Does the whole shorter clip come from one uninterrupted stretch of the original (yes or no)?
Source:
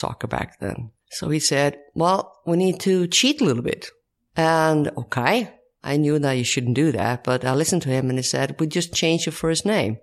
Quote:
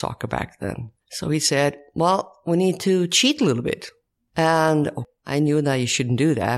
no